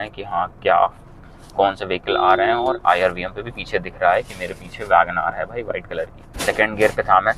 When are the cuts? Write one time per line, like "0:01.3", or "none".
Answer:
0:06.4